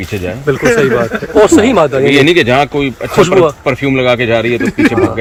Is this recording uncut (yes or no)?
yes